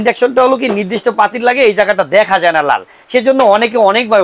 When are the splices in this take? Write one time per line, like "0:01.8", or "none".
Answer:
none